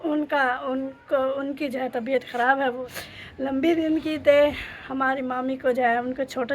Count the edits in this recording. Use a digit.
1